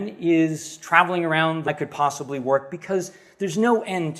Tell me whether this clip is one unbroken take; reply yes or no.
yes